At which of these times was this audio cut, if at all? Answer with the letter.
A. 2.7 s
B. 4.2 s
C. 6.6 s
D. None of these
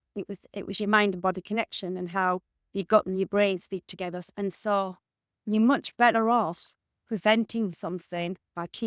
B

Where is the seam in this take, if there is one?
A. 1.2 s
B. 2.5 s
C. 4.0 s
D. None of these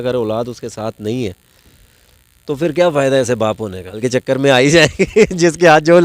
C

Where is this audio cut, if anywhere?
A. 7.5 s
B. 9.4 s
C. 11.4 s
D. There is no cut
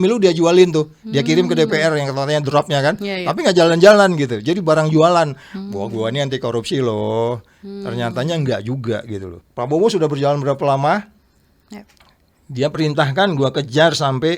B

